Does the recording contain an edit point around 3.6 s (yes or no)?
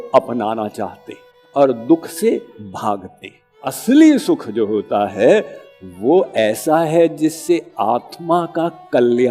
yes